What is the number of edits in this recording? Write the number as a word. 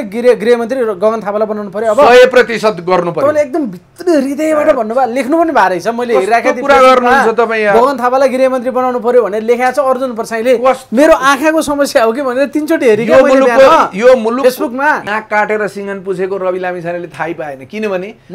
one